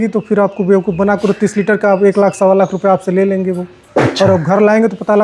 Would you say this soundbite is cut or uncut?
uncut